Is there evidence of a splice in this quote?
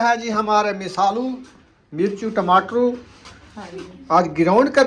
no; 0 cuts

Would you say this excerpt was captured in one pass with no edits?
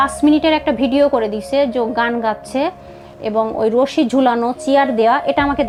yes; 0 cuts

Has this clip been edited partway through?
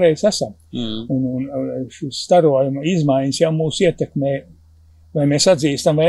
no; 0 cuts

